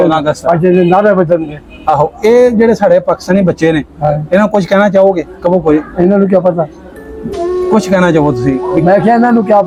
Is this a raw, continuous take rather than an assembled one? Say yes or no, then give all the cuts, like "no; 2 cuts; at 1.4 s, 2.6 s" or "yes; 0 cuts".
yes; 0 cuts